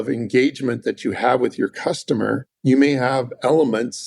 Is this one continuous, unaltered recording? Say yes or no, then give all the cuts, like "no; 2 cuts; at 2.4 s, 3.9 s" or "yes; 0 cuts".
no; 1 cut; at 2.5 s